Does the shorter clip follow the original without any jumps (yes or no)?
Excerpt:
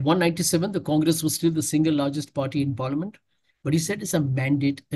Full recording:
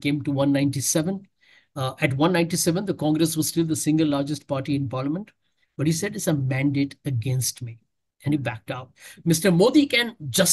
yes